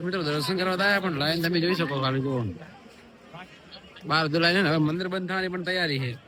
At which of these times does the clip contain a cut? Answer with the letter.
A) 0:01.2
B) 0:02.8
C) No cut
C